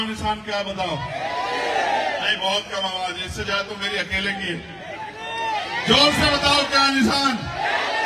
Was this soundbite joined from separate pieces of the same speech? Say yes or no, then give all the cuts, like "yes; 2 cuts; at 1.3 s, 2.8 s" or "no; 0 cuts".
no; 0 cuts